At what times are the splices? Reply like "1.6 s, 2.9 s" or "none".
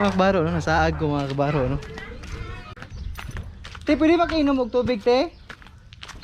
2.7 s